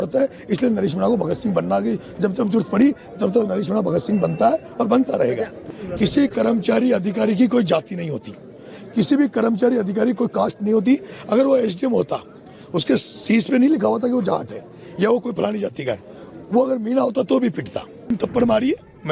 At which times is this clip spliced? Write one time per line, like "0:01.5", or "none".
0:05.7
0:18.1

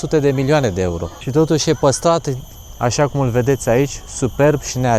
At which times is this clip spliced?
none

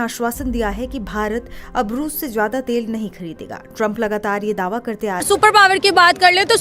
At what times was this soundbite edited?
0:05.2

